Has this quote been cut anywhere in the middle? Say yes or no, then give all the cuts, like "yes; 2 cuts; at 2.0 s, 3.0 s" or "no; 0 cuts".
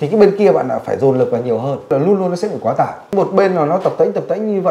yes; 2 cuts; at 1.9 s, 3.1 s